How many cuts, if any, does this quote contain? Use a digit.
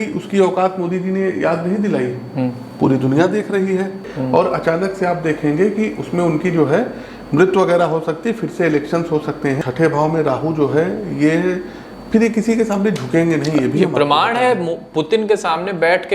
2